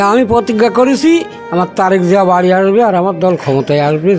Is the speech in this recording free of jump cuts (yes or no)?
no